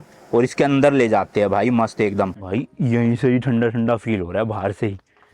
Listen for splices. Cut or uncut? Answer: cut